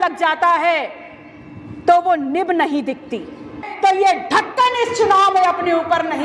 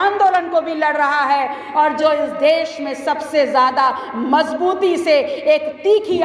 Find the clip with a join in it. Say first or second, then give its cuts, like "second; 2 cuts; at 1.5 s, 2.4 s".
first; 1 cut; at 3.6 s